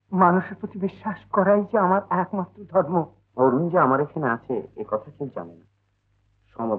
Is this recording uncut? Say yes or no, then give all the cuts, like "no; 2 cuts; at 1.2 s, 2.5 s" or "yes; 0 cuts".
no; 1 cut; at 3.2 s